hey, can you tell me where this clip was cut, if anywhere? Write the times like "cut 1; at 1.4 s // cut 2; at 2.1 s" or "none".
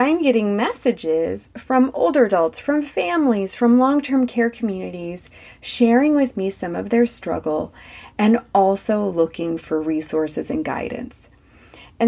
none